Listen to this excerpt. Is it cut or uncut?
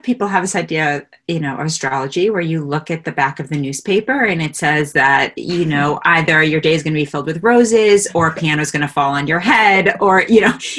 uncut